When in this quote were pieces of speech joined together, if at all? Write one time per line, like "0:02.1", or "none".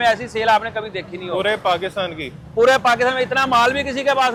none